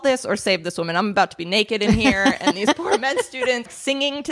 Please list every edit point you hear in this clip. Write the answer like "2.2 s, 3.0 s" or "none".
none